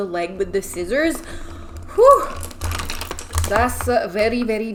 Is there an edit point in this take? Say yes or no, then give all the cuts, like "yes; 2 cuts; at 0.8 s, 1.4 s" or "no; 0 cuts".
no; 0 cuts